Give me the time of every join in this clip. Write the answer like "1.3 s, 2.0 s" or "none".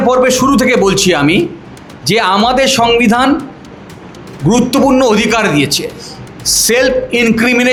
none